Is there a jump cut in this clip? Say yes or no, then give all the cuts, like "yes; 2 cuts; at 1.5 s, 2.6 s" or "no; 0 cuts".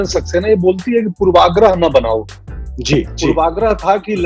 no; 0 cuts